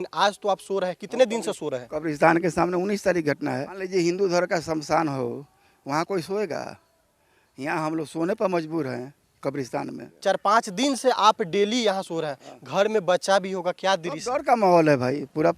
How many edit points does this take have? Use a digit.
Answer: 2